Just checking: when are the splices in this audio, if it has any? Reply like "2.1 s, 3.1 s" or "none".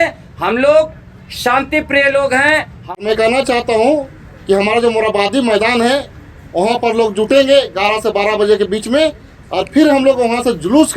2.8 s

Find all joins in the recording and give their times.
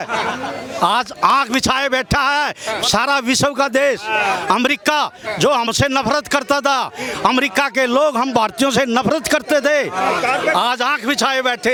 none

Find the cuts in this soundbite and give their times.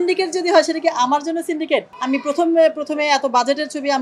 1.9 s

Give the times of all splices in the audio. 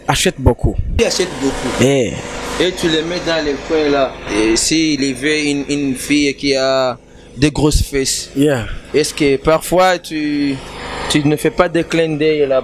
1.0 s, 4.2 s

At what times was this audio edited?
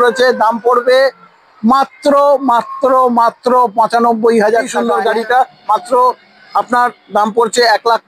4.8 s

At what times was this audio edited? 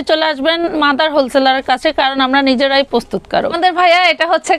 3.5 s

